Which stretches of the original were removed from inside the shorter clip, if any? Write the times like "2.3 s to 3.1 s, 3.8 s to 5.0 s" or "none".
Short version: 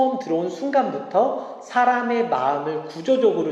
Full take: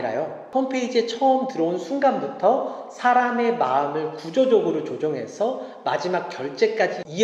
none